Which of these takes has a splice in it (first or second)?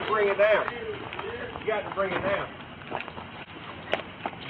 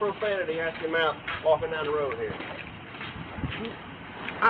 first